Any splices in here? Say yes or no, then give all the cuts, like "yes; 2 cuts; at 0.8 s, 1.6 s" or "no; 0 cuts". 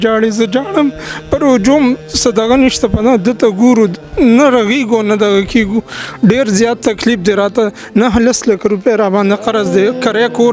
no; 0 cuts